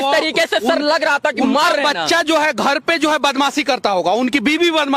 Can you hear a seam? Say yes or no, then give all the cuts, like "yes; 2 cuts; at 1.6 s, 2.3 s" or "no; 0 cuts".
no; 0 cuts